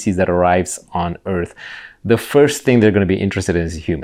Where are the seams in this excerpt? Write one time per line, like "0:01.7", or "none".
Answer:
none